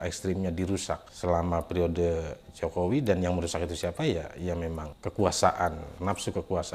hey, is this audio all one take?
no; 2 cuts; at 4.9 s, 5.9 s

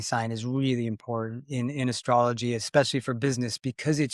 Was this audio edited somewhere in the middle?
no; 0 cuts

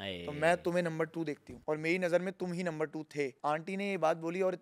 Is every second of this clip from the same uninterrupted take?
no; 2 cuts; at 1.5 s, 3.4 s

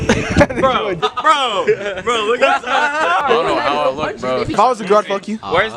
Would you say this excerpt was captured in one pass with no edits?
no; 3 cuts; at 1.0 s, 3.2 s, 4.5 s

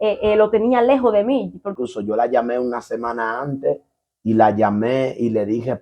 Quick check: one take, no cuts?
no; 1 cut; at 1.7 s

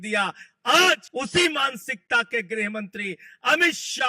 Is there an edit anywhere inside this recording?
yes; 1 cut; at 1.1 s

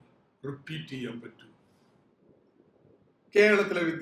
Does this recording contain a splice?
yes; 1 cut; at 2.1 s

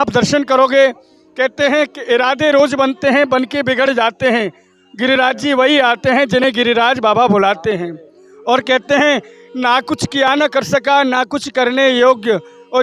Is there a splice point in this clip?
no; 0 cuts

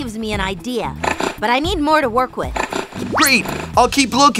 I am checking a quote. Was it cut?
yes; 1 cut; at 2.8 s

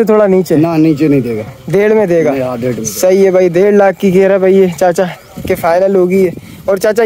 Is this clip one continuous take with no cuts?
yes; 0 cuts

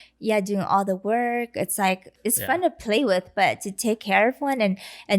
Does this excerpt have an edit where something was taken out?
yes; 1 cut; at 2.1 s

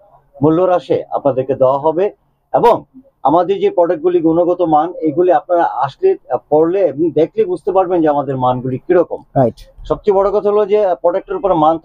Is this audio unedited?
yes; 0 cuts

